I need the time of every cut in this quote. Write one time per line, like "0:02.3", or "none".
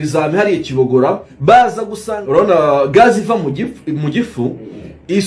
0:01.3
0:02.2